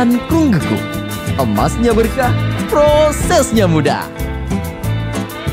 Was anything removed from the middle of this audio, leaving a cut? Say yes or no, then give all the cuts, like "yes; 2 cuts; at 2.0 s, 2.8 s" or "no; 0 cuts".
no; 0 cuts